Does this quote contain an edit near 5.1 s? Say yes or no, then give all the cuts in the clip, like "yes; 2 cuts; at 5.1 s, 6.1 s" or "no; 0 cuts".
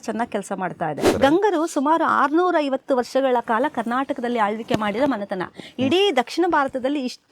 no; 1 cut; at 1.1 s